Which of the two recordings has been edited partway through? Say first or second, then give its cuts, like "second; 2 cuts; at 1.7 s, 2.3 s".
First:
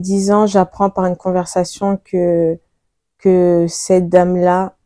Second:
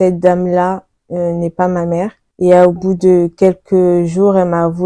second; 1 cut; at 2.2 s